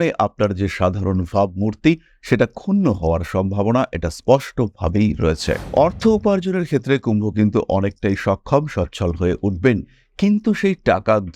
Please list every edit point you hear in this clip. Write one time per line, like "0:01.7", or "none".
0:05.6